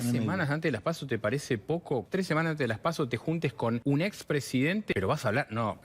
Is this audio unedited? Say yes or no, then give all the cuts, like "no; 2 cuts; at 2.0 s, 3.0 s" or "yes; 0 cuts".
no; 3 cuts; at 2.0 s, 3.8 s, 4.9 s